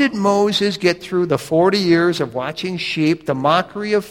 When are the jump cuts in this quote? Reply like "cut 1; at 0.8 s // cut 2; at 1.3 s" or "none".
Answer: cut 1; at 1.3 s